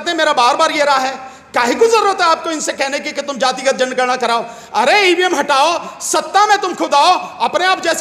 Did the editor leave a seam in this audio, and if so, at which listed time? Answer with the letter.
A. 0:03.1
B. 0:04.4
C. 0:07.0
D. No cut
D